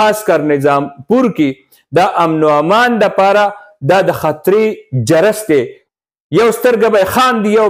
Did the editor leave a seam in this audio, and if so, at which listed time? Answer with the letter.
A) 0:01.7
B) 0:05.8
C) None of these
B